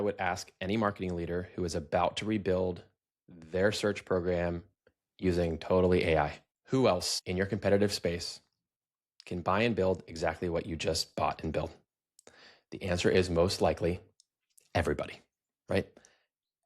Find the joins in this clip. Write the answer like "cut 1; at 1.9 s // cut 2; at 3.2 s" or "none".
cut 1; at 6.5 s // cut 2; at 7.1 s